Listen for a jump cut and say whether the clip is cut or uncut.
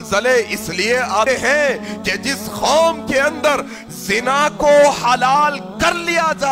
cut